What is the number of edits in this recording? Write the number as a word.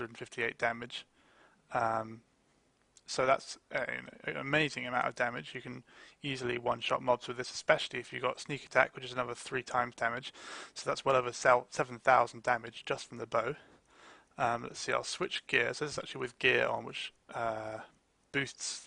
zero